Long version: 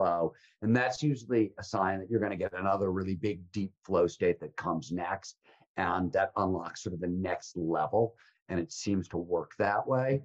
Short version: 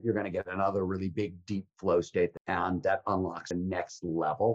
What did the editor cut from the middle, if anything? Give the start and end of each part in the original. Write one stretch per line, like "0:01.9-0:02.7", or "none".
0:04.4-0:05.7
0:06.7-0:06.9